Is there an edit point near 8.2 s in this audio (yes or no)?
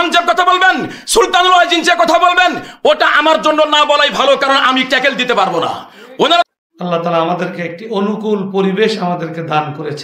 no